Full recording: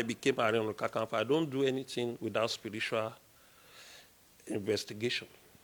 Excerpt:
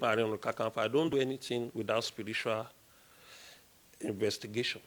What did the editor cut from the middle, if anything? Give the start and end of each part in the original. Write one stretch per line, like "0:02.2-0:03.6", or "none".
0:01.5-0:01.6